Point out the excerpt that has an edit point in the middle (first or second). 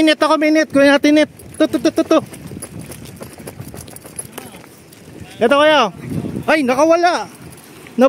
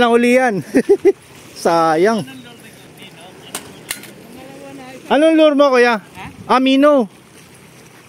second